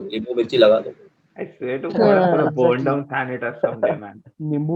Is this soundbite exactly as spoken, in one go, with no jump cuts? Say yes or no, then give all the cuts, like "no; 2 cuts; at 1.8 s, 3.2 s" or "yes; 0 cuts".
no; 1 cut; at 1.1 s